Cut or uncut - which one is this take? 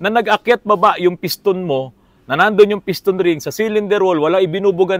uncut